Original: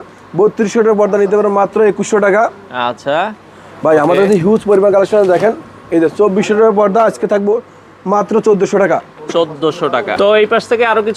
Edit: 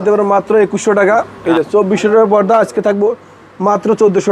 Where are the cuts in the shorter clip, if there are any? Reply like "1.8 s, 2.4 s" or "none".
1.3 s